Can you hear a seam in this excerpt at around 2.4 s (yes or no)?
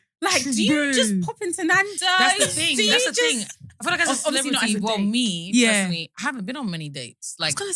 no